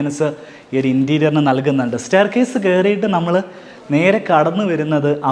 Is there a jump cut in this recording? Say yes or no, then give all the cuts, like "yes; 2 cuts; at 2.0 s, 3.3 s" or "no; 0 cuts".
no; 0 cuts